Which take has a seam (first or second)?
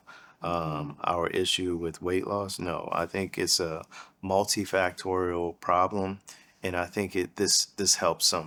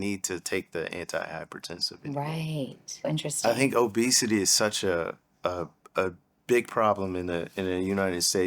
second